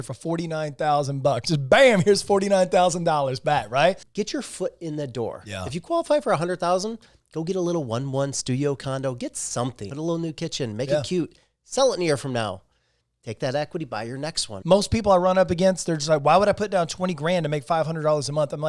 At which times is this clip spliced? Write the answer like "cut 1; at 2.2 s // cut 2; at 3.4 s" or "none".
cut 1; at 4.1 s // cut 2; at 9.9 s // cut 3; at 14.5 s